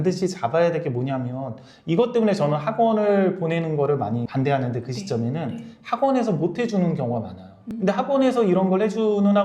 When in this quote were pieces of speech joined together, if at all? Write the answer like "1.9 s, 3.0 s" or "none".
7.7 s